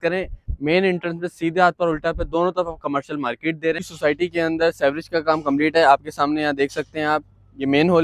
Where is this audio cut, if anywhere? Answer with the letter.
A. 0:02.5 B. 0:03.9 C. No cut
B